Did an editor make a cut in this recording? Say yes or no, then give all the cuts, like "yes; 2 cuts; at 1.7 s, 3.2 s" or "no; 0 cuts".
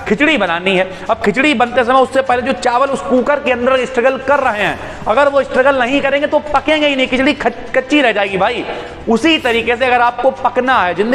no; 0 cuts